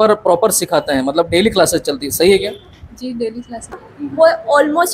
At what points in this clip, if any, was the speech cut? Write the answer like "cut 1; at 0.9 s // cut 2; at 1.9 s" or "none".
cut 1; at 3.8 s

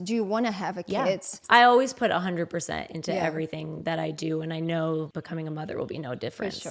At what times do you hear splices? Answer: cut 1; at 1.3 s // cut 2; at 5.1 s

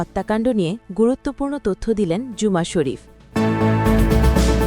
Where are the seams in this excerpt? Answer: cut 1; at 3.2 s

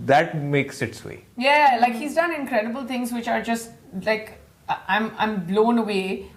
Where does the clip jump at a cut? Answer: none

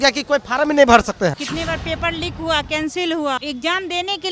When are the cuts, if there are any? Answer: cut 1; at 1.5 s // cut 2; at 3.4 s

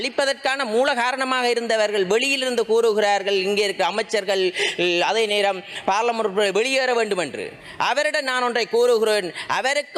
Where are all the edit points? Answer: none

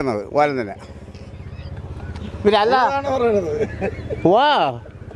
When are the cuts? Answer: none

